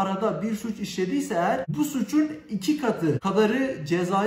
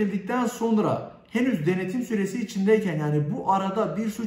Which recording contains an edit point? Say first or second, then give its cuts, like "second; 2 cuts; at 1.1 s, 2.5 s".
first; 2 cuts; at 1.7 s, 3.2 s